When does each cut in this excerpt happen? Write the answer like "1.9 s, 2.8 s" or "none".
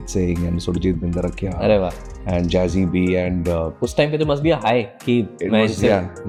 none